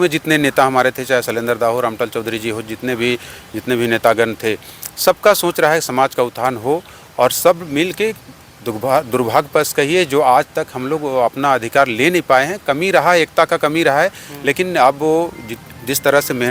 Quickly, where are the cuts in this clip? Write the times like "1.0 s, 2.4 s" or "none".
none